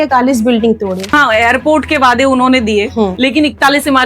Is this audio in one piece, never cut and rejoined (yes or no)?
no